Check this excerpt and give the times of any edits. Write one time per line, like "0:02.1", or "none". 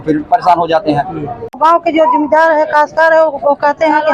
0:01.6

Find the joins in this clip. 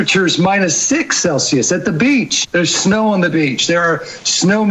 0:02.4

